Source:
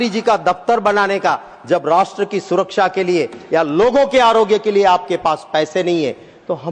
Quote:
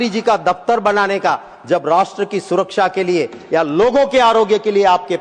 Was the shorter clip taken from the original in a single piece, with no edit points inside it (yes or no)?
yes